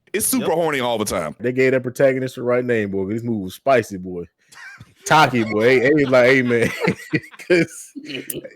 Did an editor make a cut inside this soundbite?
yes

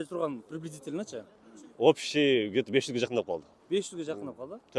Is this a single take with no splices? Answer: yes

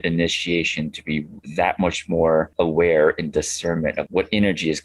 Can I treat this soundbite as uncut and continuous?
no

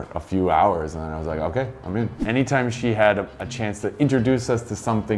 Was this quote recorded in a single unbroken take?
no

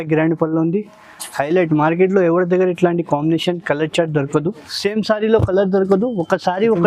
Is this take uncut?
no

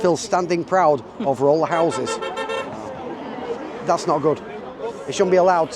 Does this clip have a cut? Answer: no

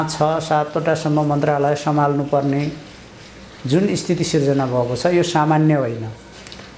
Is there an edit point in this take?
no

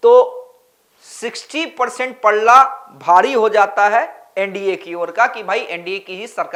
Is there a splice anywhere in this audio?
no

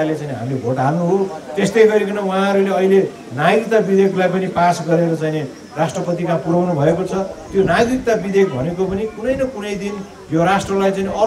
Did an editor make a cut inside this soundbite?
no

